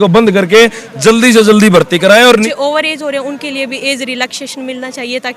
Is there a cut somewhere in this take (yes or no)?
yes